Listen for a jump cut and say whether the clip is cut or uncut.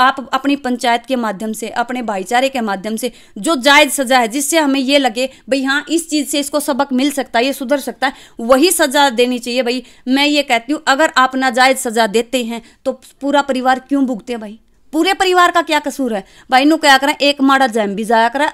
uncut